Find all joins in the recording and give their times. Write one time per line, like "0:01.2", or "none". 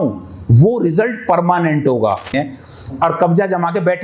0:02.3